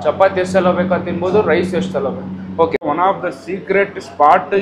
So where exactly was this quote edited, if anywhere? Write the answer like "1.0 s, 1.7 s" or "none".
2.8 s